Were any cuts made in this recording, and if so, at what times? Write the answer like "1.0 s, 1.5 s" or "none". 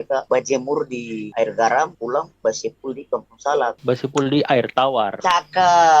3.8 s, 5.1 s